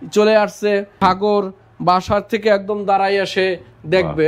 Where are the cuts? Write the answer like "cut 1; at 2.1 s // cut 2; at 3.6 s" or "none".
cut 1; at 0.9 s